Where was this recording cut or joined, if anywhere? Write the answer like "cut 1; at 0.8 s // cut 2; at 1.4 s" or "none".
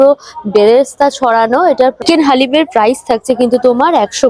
none